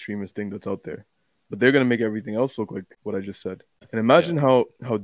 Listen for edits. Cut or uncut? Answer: cut